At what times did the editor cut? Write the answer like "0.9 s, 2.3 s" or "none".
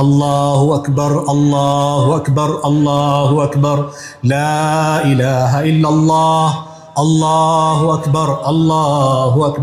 none